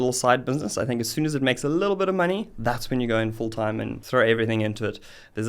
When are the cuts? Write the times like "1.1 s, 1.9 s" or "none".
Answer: 4.0 s